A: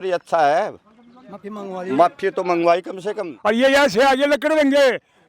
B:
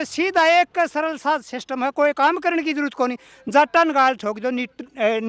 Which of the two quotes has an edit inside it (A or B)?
A